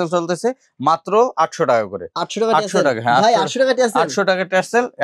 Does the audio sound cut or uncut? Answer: uncut